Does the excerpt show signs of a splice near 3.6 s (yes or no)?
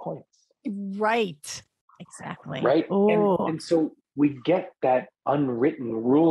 no